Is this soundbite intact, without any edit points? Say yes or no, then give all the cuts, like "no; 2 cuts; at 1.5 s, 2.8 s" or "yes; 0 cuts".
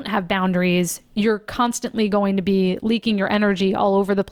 yes; 0 cuts